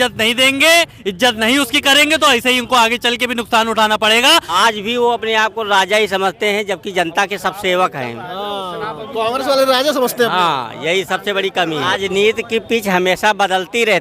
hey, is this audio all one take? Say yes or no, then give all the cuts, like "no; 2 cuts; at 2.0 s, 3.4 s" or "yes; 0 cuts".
no; 2 cuts; at 4.6 s, 11.9 s